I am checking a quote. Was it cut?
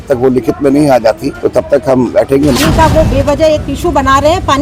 yes; 2 cuts; at 1.3 s, 2.6 s

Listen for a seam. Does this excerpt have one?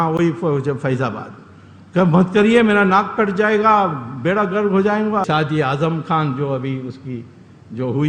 yes; 1 cut; at 5.2 s

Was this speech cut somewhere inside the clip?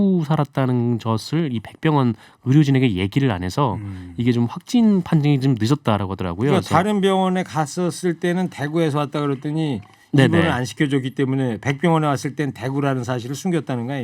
no; 0 cuts

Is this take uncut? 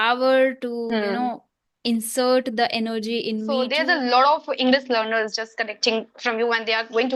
no; 1 cut; at 3.7 s

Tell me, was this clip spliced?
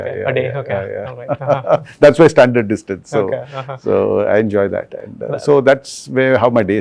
no; 0 cuts

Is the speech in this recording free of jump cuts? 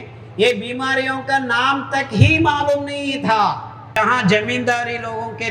no; 1 cut; at 4.0 s

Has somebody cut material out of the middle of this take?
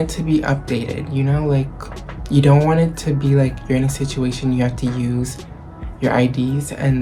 no; 0 cuts

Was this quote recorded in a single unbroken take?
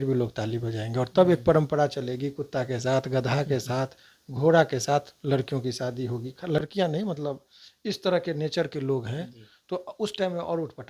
yes; 0 cuts

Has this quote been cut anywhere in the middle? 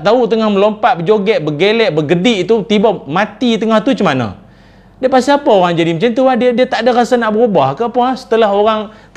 no; 0 cuts

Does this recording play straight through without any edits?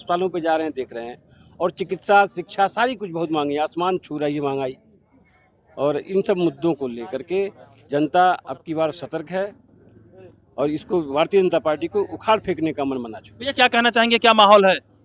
yes; 0 cuts

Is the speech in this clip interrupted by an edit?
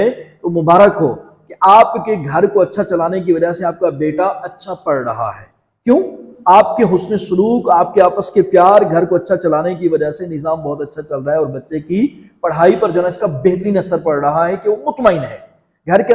no; 0 cuts

